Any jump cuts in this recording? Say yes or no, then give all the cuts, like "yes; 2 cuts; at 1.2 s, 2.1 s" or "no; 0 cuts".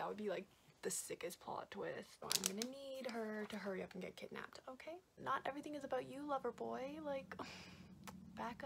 yes; 2 cuts; at 2.1 s, 5.1 s